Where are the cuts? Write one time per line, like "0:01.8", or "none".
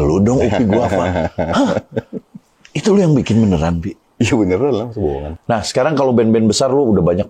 0:05.3